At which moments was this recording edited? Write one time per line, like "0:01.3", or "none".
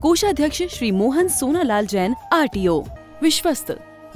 0:03.0